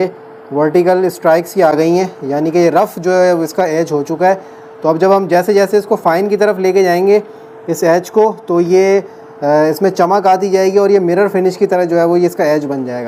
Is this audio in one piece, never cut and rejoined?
yes; 0 cuts

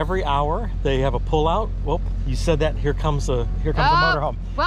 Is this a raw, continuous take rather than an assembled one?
yes; 0 cuts

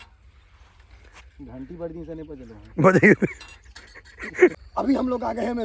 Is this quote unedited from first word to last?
no; 1 cut; at 4.5 s

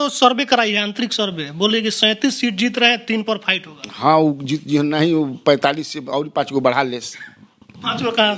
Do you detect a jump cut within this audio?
no; 0 cuts

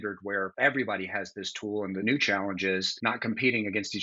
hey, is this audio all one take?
no; 1 cut; at 2.0 s

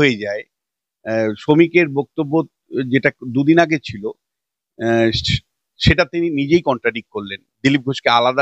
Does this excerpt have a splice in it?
no; 0 cuts

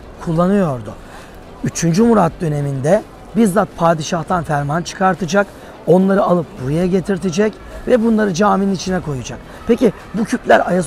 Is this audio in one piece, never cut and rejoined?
yes; 0 cuts

